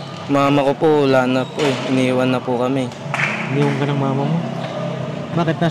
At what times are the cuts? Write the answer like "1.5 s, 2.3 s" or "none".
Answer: none